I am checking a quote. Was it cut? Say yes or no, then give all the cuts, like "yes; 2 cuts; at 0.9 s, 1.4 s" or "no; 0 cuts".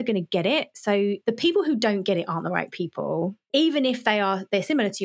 yes; 2 cuts; at 1.2 s, 3.5 s